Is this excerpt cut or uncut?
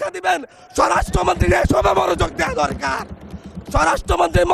uncut